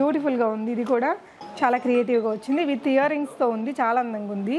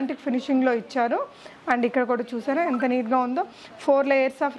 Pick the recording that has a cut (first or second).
first